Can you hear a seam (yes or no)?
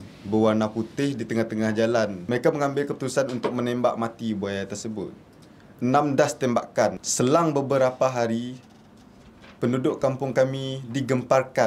yes